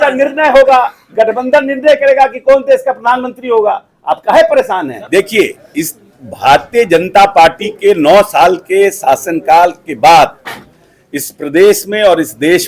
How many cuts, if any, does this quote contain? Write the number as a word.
one